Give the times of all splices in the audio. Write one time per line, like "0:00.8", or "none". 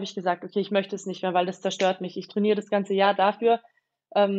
none